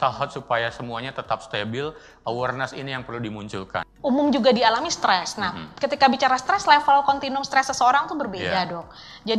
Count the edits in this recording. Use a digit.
1